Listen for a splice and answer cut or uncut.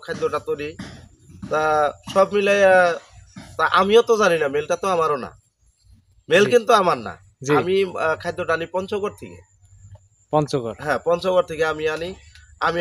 uncut